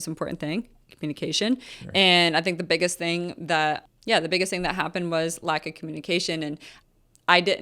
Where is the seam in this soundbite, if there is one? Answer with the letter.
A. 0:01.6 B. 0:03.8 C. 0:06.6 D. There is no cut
B